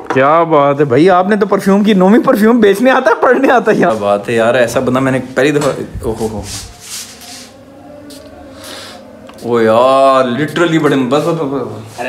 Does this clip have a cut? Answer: yes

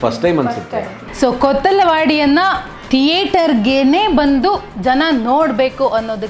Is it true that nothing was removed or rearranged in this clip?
no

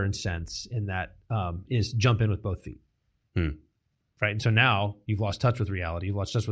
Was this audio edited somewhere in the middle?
no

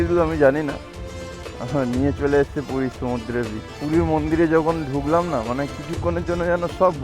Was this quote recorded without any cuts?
no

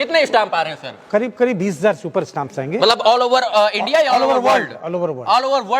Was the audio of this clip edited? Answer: no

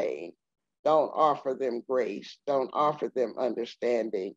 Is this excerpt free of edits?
yes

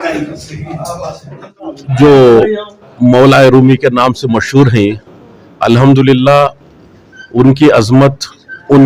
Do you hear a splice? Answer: yes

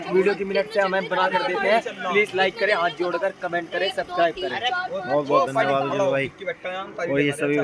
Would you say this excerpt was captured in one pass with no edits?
yes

